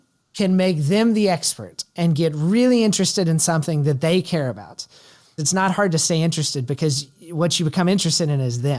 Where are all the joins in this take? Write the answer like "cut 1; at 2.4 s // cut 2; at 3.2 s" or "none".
none